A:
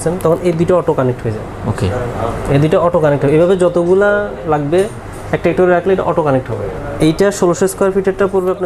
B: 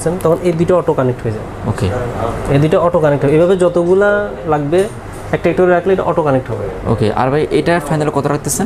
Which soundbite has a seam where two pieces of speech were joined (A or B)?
A